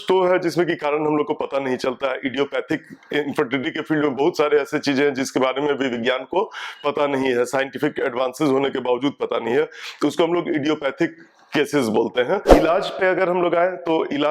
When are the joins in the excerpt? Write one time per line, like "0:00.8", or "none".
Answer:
0:12.5